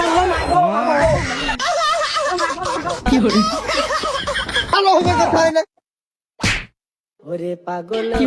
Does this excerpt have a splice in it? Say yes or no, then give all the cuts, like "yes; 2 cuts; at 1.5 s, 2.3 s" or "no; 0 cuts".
yes; 1 cut; at 4.7 s